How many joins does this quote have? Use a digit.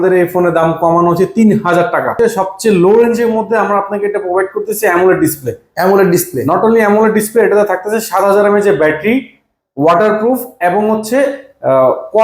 1